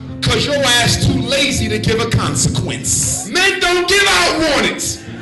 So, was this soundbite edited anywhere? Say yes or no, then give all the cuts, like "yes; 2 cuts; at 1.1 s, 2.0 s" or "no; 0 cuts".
yes; 1 cut; at 3.2 s